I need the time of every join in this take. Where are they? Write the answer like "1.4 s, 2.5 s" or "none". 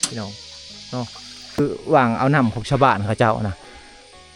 1.6 s

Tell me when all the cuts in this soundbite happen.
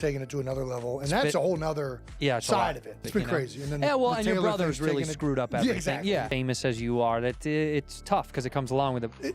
3.0 s

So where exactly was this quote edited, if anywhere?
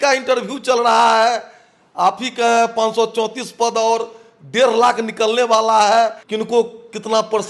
6.2 s

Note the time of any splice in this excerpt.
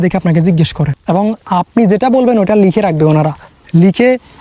1.0 s

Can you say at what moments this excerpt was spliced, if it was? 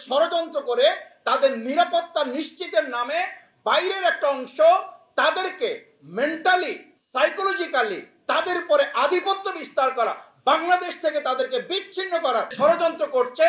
12.5 s

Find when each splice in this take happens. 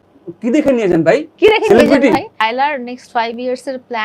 2.4 s

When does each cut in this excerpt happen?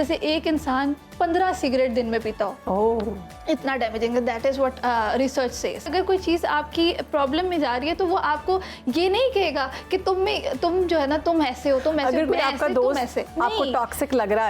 5.9 s

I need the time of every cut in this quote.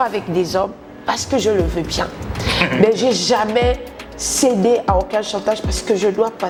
none

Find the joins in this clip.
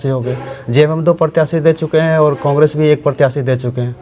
none

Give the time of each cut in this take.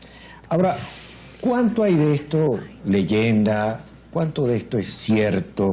1.6 s

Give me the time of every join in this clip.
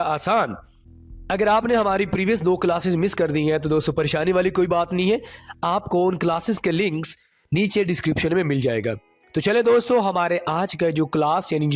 none

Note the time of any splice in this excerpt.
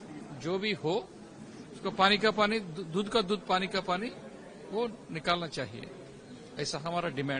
none

